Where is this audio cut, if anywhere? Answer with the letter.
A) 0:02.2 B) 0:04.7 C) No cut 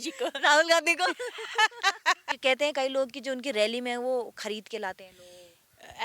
A